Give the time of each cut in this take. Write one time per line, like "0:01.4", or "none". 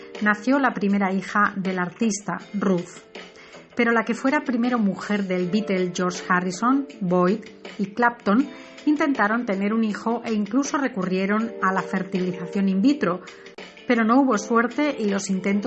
0:05.0